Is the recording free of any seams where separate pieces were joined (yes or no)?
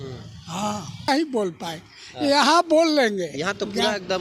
no